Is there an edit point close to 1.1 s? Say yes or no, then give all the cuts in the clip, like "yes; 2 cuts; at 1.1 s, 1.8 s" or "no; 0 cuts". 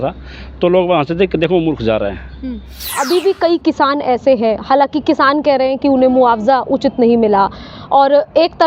no; 1 cut; at 2.9 s